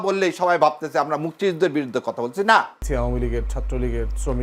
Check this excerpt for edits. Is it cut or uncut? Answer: cut